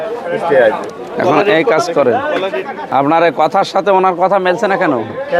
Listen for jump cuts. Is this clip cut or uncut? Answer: cut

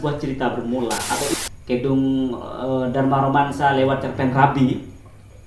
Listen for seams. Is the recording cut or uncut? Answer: cut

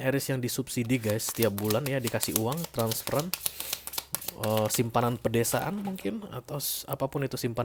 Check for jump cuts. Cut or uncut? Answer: uncut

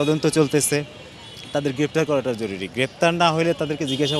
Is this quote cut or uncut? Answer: uncut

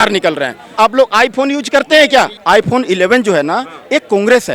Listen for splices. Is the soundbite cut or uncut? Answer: cut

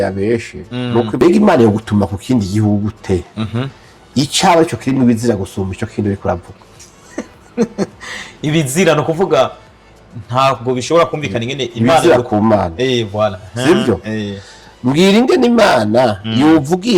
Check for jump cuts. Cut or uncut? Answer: cut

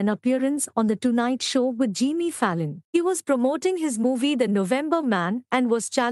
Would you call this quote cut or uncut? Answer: uncut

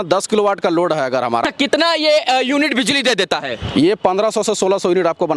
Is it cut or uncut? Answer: cut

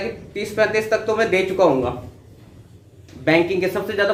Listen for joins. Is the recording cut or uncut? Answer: uncut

